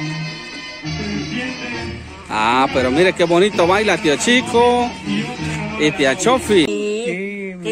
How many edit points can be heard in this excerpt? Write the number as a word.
one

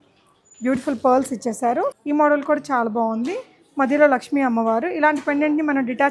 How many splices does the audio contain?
one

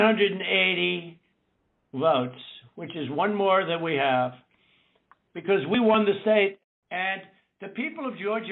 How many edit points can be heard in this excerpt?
one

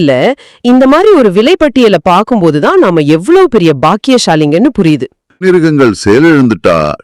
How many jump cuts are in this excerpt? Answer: one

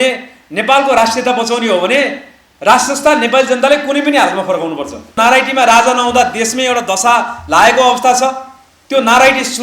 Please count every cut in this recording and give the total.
one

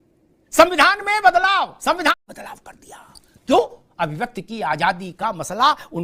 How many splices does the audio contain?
one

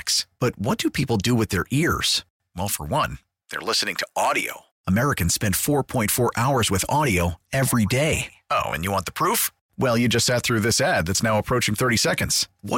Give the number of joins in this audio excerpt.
zero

